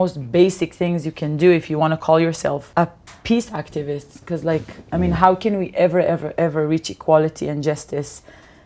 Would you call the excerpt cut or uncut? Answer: cut